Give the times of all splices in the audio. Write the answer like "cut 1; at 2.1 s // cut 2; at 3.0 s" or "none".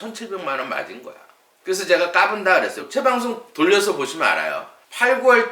cut 1; at 2.8 s